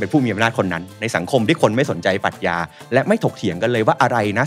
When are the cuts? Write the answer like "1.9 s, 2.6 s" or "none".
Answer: none

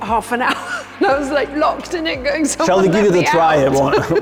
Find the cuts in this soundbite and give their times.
none

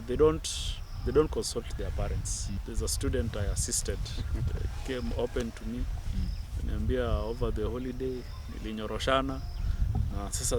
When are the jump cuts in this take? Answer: 2.6 s

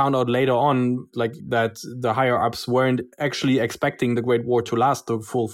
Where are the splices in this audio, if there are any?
1.4 s, 3.2 s

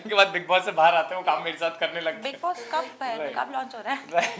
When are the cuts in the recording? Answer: none

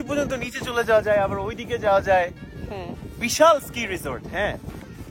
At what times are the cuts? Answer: none

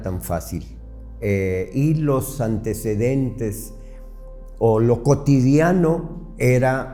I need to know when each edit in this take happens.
none

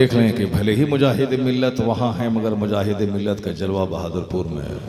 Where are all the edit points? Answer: none

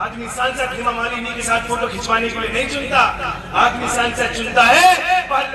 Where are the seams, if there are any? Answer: none

